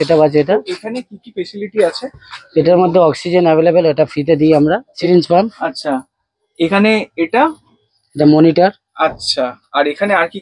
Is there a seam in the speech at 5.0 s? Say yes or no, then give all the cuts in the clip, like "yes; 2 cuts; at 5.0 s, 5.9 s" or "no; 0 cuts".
yes; 1 cut; at 5.0 s